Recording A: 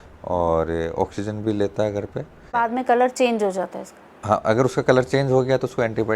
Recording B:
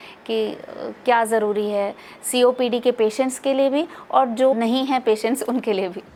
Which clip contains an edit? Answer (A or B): A